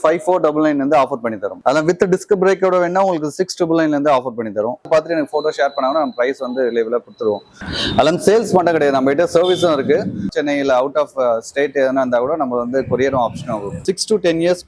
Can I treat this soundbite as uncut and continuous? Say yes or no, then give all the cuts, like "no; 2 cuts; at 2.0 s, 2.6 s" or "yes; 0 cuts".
no; 5 cuts; at 1.6 s, 4.9 s, 7.5 s, 10.3 s, 13.8 s